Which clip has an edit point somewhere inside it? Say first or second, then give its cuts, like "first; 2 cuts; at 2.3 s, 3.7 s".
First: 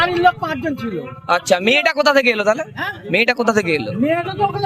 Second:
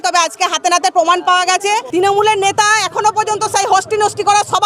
second; 1 cut; at 1.9 s